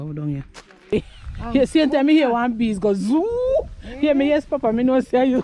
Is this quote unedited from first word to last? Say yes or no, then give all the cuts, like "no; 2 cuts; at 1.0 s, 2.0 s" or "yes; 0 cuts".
no; 1 cut; at 0.9 s